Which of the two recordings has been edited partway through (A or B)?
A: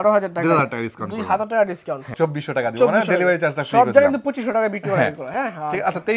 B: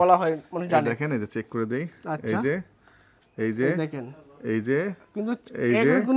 A